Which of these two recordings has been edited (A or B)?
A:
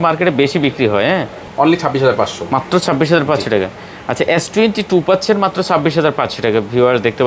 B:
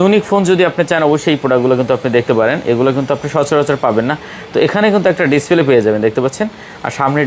A